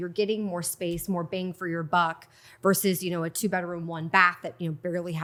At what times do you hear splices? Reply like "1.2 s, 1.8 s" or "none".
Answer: none